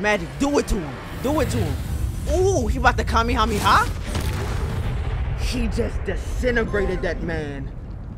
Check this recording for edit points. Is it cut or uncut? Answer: uncut